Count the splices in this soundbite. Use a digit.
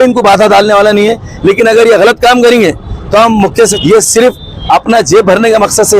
1